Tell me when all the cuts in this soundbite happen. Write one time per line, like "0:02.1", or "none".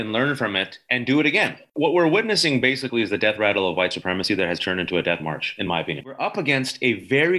0:01.7
0:06.1